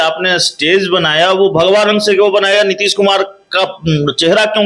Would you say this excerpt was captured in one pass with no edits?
yes; 0 cuts

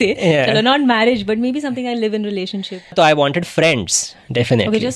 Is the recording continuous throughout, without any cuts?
no; 1 cut; at 2.9 s

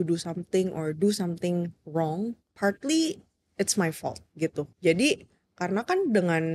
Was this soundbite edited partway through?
yes; 2 cuts; at 2.4 s, 4.7 s

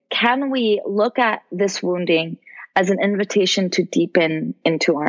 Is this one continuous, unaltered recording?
yes; 0 cuts

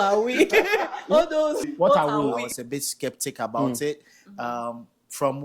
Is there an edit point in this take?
yes; 2 cuts; at 1.6 s, 2.4 s

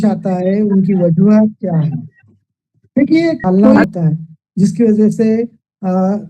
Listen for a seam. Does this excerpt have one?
yes; 1 cut; at 3.4 s

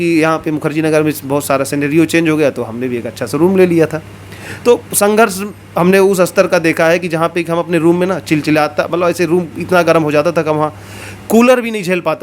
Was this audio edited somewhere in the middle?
no; 0 cuts

